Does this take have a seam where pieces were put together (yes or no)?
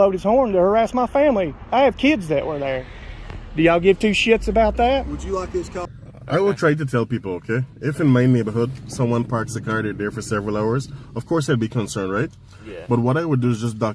yes